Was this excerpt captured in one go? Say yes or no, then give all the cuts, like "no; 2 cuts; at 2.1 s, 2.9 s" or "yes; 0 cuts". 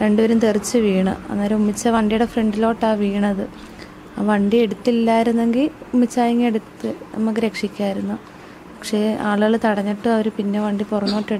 yes; 0 cuts